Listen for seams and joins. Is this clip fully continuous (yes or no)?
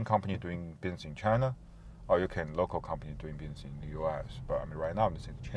yes